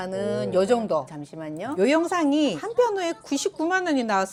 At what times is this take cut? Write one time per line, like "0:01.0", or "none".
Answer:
none